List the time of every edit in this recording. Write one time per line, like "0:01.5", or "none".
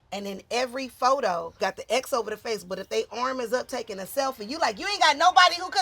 0:01.5